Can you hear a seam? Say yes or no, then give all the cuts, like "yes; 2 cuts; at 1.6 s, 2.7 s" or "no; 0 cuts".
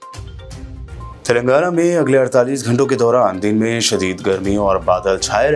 yes; 1 cut; at 0.9 s